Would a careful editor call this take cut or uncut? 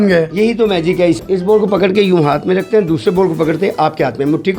cut